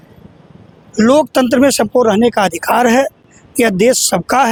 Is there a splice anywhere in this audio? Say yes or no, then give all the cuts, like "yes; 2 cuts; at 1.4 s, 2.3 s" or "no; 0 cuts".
no; 0 cuts